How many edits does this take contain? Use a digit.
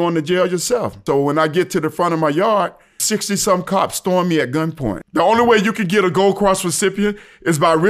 3